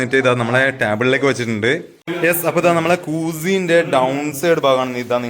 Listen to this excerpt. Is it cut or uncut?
cut